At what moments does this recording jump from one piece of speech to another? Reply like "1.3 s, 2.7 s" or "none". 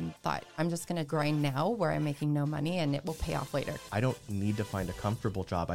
0.9 s, 3.8 s